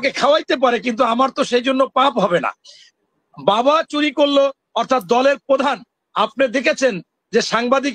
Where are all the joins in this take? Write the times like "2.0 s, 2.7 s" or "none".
none

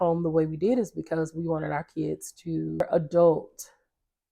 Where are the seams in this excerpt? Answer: 2.8 s

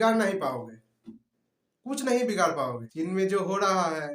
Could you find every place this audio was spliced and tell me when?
2.8 s

